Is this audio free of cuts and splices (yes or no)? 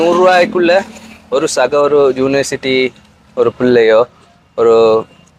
yes